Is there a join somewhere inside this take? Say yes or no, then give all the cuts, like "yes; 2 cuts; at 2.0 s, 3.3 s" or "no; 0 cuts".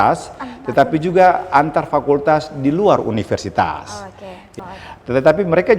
yes; 1 cut; at 4.5 s